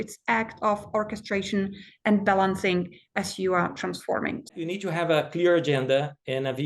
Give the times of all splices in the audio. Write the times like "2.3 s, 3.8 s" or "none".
4.6 s